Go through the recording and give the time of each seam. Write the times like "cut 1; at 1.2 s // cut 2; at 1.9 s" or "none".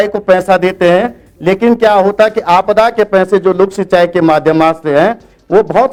none